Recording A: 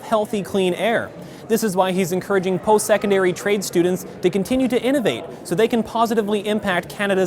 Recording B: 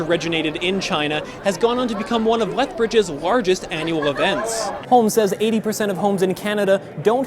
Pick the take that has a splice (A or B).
B